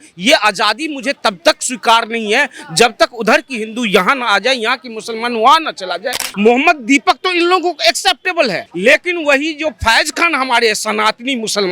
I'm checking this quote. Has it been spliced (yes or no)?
yes